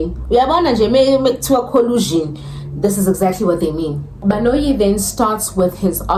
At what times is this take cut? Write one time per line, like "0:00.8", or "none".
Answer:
none